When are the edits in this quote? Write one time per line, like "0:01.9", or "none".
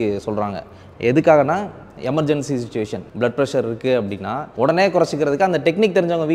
0:03.0
0:04.4